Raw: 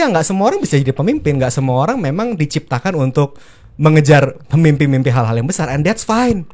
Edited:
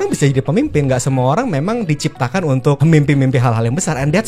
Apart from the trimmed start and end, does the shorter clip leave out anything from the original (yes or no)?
yes